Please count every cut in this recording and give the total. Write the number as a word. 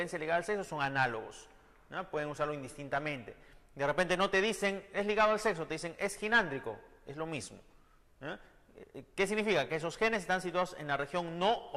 zero